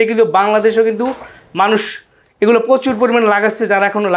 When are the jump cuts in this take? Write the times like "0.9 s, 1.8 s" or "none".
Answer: none